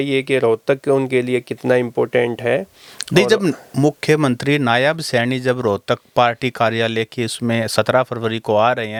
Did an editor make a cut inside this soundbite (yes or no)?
no